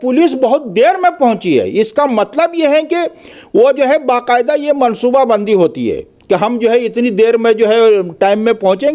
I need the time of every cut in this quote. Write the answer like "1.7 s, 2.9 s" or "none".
none